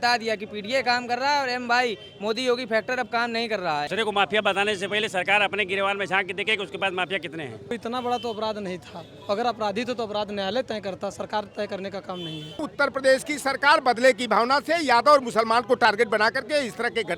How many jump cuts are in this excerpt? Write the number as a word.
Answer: three